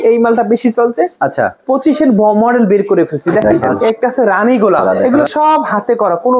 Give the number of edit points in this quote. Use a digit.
2